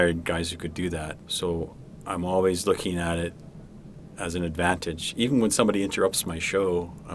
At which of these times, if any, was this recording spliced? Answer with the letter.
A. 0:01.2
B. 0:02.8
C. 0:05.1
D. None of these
A